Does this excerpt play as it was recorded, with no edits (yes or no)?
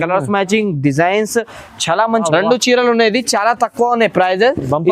no